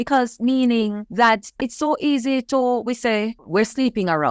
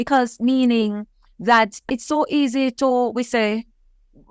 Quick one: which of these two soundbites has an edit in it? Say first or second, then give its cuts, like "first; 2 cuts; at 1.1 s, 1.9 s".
first; 2 cuts; at 1.0 s, 3.4 s